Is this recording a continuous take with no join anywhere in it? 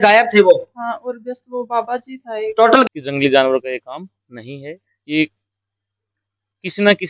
no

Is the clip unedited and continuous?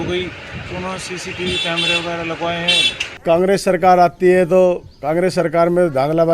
no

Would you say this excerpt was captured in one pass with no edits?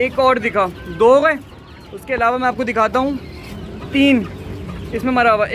yes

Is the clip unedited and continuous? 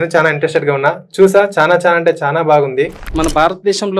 no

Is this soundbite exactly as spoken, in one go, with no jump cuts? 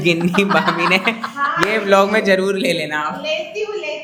yes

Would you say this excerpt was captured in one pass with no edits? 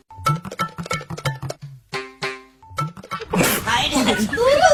yes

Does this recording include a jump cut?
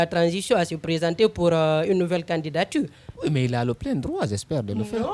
no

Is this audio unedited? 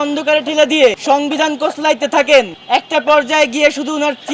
no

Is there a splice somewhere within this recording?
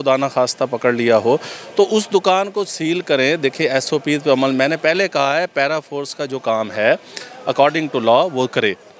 no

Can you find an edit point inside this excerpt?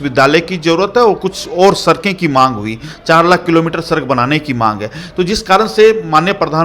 no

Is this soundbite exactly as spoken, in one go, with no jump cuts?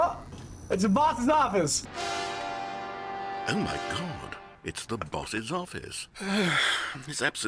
yes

